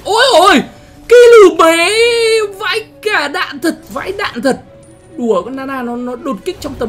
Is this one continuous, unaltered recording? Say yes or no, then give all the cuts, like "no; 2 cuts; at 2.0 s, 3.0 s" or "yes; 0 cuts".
no; 1 cut; at 3.9 s